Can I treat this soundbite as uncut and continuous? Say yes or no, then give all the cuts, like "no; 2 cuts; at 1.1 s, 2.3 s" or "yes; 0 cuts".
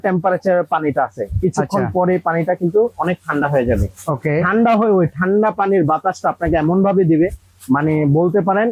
yes; 0 cuts